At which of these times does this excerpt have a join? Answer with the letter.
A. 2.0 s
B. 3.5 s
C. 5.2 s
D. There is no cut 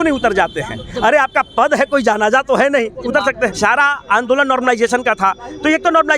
B